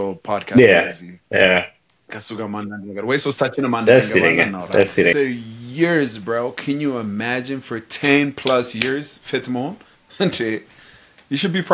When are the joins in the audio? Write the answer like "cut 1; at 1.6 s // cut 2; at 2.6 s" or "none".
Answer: cut 1; at 5.1 s